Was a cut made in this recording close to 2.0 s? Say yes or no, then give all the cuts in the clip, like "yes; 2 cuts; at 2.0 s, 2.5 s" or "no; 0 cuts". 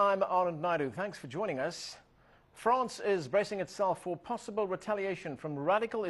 no; 1 cut; at 4.7 s